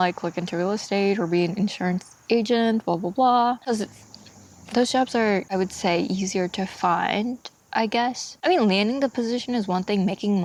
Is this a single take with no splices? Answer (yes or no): yes